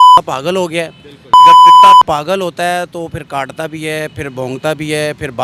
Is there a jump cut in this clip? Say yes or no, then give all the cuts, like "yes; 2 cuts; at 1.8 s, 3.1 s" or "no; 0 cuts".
no; 0 cuts